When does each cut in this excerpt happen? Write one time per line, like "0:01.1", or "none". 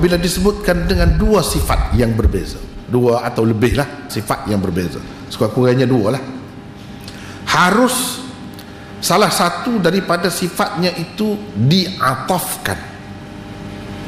0:04.1

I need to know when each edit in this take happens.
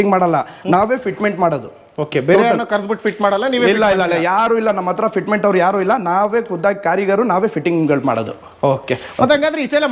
none

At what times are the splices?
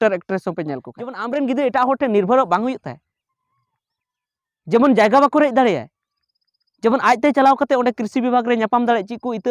0:01.2

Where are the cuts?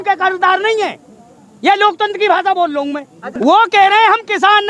0:03.4

